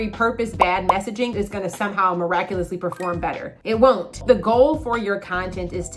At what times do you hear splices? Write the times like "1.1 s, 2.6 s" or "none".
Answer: 4.1 s